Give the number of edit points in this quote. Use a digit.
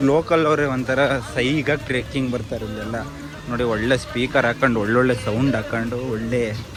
0